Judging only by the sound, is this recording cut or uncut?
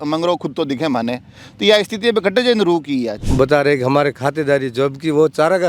cut